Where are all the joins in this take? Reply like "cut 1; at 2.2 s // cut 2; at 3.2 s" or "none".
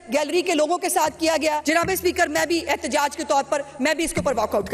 cut 1; at 1.6 s